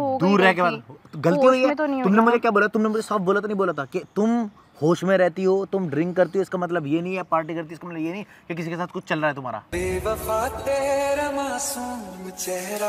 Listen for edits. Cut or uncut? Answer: cut